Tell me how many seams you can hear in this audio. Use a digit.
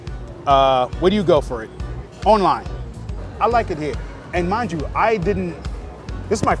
1